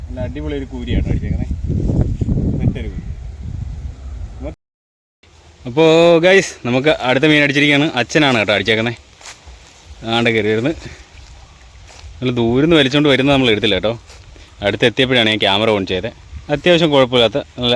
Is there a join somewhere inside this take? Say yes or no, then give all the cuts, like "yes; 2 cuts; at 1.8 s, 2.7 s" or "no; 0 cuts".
no; 0 cuts